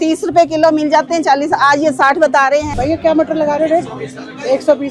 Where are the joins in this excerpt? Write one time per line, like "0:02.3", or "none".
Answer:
0:02.7